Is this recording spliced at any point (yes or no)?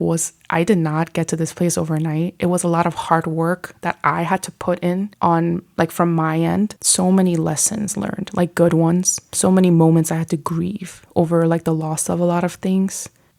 yes